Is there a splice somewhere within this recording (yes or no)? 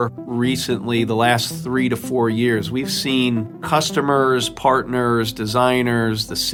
no